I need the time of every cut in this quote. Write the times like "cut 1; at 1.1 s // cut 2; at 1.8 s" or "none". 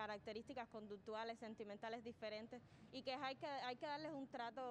none